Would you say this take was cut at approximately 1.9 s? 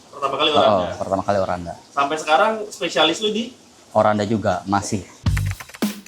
no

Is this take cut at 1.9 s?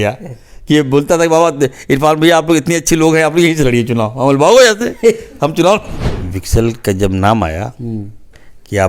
no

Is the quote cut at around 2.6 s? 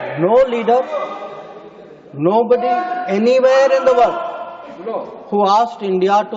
no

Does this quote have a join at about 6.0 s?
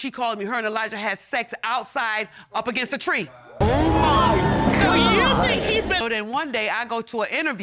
yes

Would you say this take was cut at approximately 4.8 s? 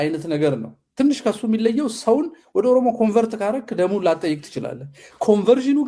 yes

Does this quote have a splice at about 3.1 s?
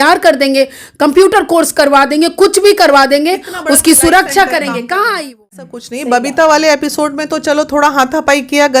no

